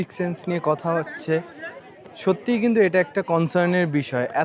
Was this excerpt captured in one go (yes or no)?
yes